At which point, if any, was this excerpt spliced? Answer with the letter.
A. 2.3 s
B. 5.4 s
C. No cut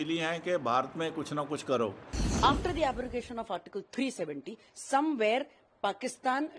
A